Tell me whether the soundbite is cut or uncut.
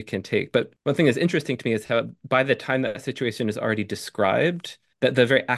uncut